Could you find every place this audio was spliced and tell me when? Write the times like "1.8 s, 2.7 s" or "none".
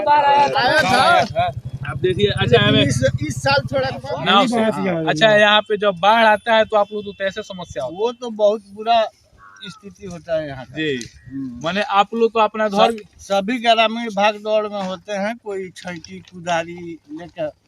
4.0 s

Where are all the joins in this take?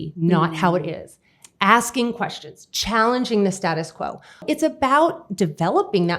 4.4 s

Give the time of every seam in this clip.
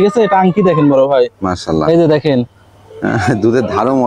none

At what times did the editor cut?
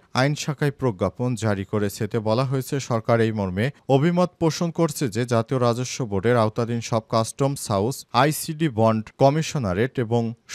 none

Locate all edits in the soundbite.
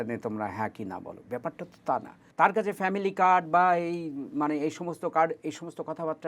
2.2 s

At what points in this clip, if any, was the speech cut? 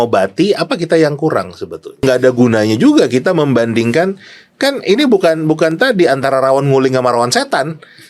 2.0 s

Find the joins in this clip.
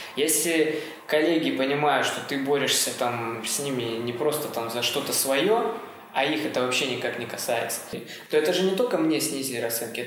8.1 s

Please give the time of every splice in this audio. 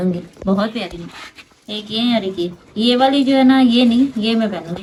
none

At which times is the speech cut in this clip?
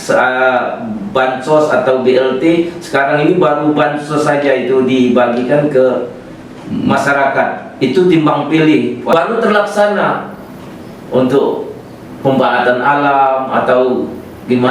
9.1 s

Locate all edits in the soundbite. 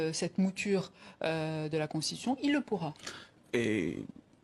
none

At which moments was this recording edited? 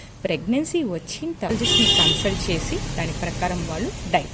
1.5 s

